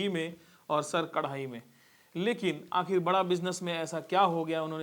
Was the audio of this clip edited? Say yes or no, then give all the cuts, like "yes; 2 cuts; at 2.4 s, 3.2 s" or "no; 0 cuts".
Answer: no; 0 cuts